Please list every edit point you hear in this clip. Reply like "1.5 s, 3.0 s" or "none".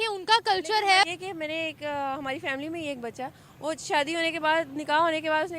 1.1 s